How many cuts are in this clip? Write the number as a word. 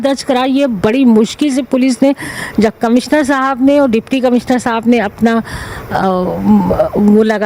zero